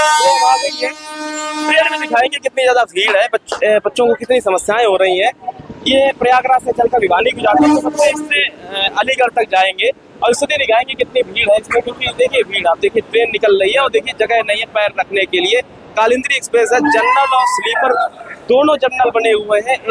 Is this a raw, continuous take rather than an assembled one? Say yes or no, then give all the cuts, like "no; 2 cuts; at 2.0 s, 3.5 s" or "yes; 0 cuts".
yes; 0 cuts